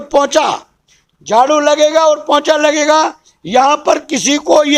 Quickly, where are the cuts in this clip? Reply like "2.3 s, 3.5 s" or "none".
none